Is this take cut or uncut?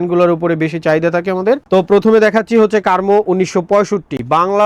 uncut